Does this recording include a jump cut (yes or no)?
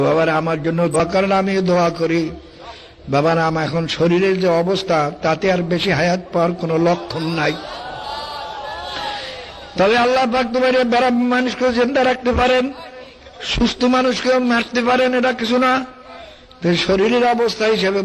yes